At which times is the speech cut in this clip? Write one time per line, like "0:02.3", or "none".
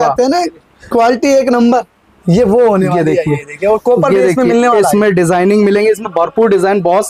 none